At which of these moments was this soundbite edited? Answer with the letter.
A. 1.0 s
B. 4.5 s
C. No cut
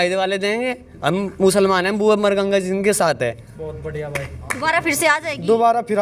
B